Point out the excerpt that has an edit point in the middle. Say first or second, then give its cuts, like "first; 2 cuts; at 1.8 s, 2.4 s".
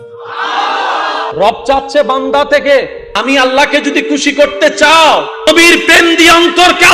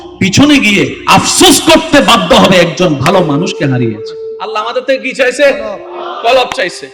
first; 3 cuts; at 1.3 s, 3.0 s, 5.5 s